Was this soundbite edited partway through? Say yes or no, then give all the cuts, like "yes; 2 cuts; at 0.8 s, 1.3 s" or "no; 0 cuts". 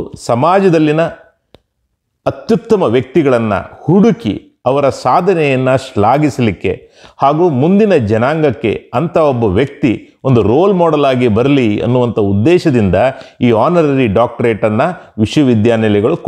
no; 0 cuts